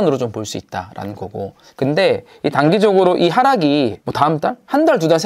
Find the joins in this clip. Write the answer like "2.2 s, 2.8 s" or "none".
1.6 s